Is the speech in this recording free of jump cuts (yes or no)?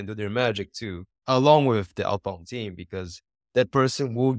yes